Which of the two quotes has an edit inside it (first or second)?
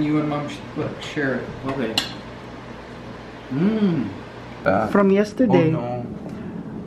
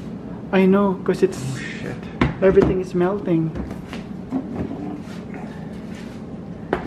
first